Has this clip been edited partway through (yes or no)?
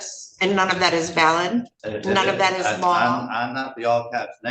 yes